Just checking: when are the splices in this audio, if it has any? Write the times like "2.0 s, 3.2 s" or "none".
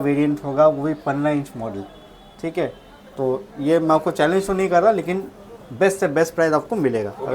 none